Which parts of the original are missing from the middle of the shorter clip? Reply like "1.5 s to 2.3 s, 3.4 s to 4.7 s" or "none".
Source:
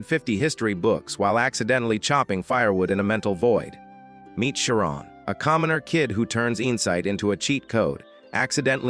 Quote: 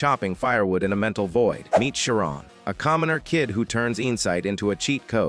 3.7 s to 4.3 s